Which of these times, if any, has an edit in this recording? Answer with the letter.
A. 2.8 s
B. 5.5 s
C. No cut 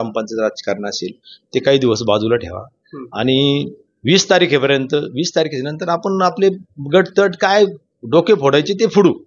C